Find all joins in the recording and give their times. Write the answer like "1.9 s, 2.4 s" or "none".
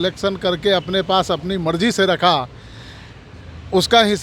none